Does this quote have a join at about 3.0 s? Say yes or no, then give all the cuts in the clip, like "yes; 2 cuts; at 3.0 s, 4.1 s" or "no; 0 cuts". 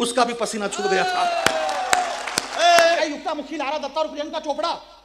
yes; 1 cut; at 3.0 s